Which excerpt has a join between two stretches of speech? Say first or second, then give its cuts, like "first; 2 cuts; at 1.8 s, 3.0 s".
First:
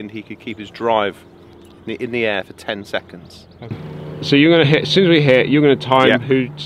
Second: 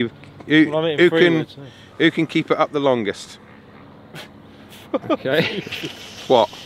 first; 1 cut; at 3.9 s